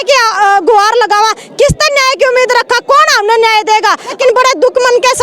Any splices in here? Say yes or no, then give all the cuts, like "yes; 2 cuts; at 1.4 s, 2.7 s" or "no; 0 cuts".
yes; 1 cut; at 4.2 s